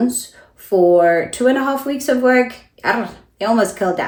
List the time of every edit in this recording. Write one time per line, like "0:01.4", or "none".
none